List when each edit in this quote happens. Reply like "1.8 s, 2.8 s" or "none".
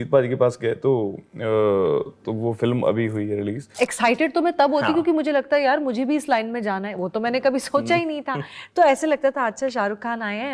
3.7 s